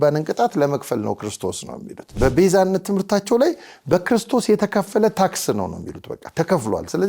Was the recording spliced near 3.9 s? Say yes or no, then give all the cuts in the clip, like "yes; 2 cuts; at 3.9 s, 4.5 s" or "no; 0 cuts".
no; 1 cut; at 2.2 s